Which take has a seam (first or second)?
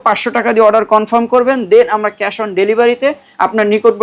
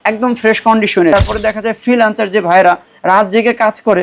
second